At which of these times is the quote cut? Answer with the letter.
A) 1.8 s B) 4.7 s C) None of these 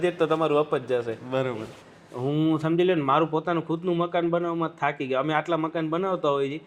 A